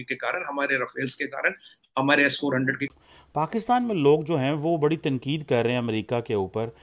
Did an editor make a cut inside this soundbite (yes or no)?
yes